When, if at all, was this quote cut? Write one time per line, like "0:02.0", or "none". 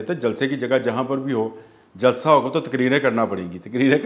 none